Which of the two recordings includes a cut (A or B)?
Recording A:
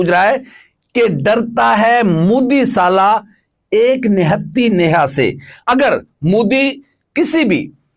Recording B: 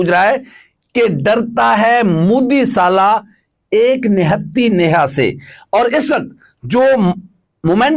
A